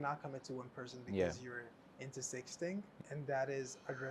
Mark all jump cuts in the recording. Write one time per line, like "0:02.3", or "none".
0:02.9